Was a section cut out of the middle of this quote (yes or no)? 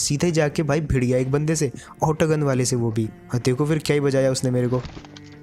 no